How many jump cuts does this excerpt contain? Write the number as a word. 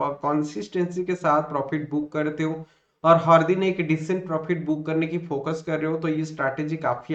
zero